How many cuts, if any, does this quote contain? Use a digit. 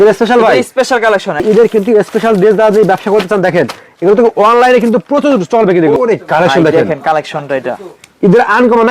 2